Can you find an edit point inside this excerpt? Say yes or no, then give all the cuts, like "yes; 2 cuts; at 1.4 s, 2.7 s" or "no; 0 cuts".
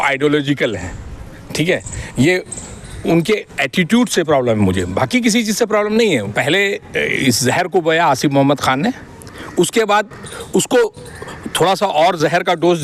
yes; 1 cut; at 6.3 s